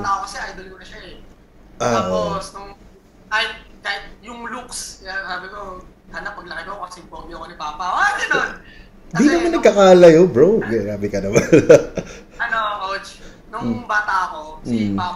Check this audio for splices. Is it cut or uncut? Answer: uncut